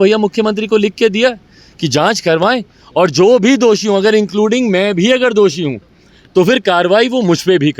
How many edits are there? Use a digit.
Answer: 0